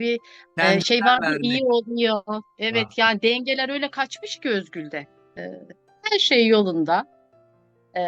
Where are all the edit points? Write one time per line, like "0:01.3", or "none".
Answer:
0:05.4